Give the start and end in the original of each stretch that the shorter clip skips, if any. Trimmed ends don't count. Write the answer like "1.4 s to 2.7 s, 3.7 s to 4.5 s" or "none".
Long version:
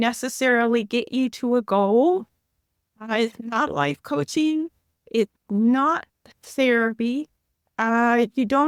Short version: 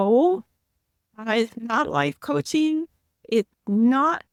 none